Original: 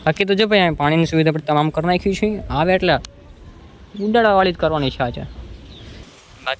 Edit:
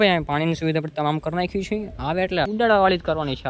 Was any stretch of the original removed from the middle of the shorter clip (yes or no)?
yes